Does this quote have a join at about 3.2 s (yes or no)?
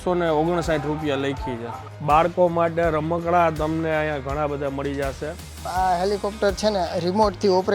no